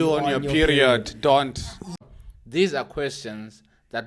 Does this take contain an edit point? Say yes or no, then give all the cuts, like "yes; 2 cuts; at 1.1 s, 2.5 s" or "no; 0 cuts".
yes; 1 cut; at 2.1 s